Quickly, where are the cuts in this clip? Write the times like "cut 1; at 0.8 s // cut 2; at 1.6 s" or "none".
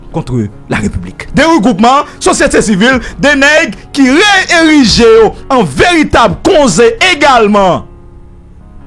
cut 1; at 1.2 s